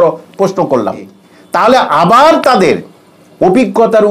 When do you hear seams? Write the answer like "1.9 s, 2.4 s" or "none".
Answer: 1.1 s

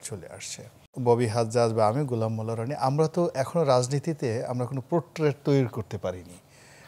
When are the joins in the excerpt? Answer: 0.9 s

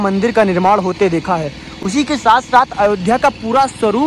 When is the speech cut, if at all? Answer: none

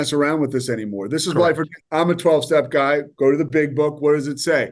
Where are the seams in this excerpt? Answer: 1.7 s

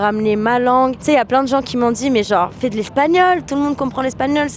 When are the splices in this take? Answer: 1.0 s

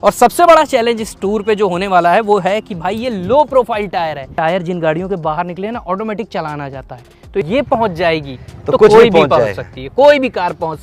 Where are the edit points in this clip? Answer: 4.3 s, 7.5 s

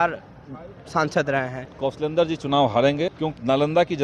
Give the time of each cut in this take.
1.6 s, 3.2 s

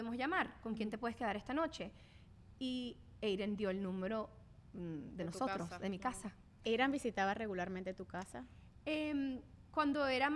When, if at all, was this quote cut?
none

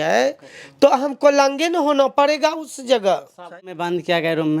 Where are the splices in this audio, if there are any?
3.6 s

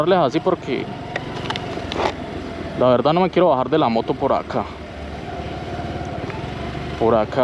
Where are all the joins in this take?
none

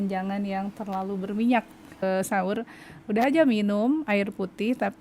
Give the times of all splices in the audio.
2.0 s

